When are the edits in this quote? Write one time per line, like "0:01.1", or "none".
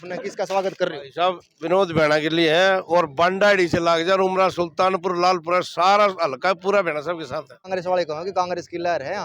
0:07.6